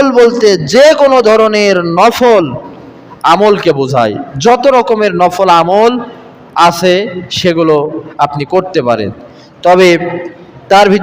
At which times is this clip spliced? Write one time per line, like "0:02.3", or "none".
none